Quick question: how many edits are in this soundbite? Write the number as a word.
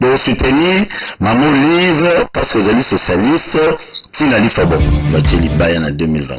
one